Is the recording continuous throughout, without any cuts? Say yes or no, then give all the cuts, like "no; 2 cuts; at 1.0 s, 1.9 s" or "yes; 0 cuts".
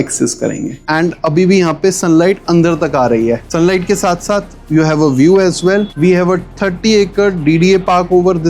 no; 2 cuts; at 0.9 s, 3.5 s